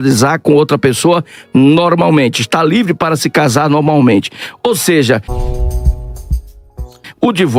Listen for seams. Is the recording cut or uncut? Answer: uncut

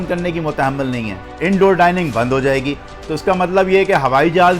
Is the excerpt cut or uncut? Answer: cut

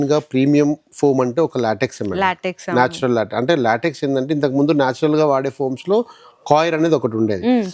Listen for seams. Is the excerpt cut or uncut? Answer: uncut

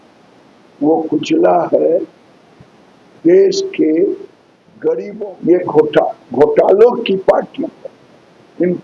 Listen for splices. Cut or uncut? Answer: cut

